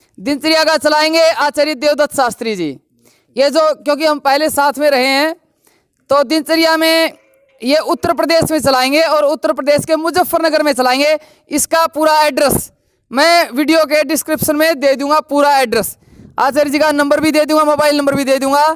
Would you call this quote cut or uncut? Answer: uncut